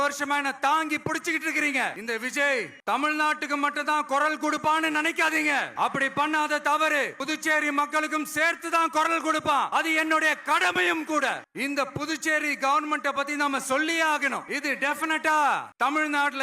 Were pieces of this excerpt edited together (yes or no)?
yes